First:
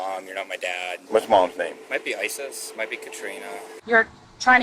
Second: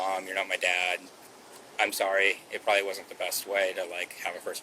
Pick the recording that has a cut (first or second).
first